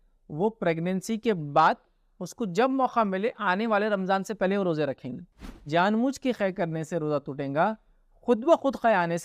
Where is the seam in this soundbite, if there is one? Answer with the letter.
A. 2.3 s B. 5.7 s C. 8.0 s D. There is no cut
B